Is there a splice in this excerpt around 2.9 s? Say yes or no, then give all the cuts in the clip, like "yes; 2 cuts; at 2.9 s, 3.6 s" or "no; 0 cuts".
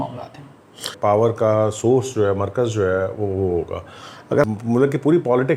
no; 2 cuts; at 0.9 s, 4.4 s